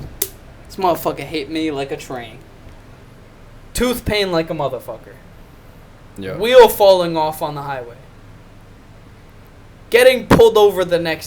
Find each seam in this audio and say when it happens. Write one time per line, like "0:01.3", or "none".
0:03.0